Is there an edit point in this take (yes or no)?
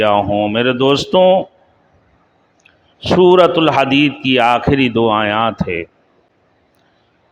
no